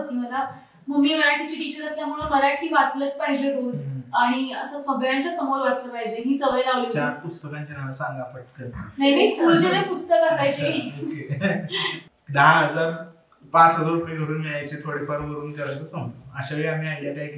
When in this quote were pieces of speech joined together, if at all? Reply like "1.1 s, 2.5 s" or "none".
12.0 s

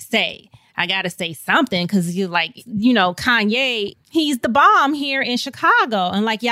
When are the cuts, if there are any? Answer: 2.6 s

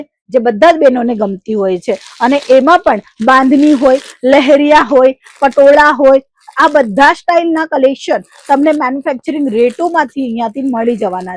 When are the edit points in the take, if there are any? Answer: none

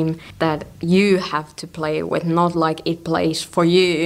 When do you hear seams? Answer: none

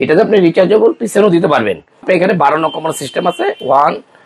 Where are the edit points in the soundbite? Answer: 2.0 s

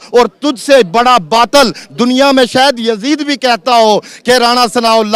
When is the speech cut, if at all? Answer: none

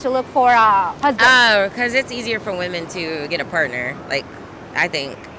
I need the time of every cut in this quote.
0.9 s

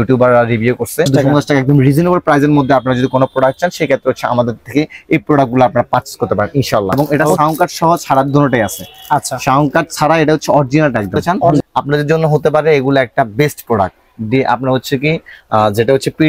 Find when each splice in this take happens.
1.1 s, 6.9 s, 11.6 s

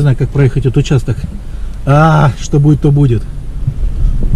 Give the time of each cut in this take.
none

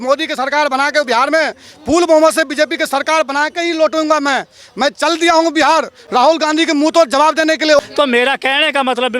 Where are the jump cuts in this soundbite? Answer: 7.9 s

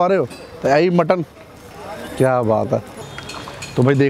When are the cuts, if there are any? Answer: 3.0 s

